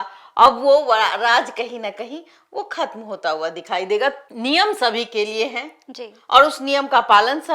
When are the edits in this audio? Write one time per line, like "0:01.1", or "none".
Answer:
0:04.2